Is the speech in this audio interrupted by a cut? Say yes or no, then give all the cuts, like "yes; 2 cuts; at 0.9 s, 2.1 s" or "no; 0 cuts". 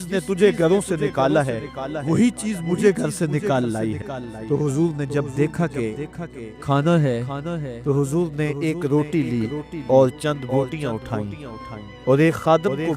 yes; 1 cut; at 4.3 s